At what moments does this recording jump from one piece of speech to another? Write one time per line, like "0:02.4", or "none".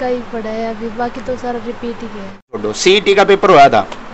0:02.6